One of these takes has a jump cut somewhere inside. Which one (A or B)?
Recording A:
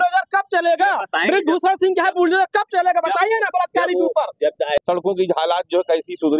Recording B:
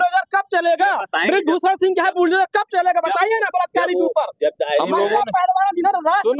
A